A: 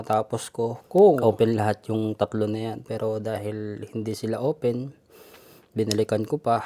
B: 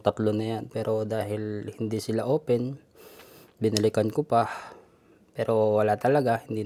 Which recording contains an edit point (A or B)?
A